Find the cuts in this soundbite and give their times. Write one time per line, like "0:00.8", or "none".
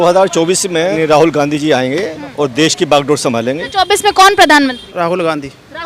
0:00.9
0:03.6
0:04.8